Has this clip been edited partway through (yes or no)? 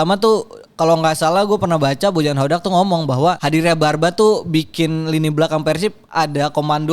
yes